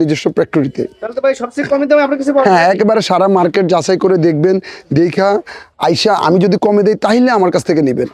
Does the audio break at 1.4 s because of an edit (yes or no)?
no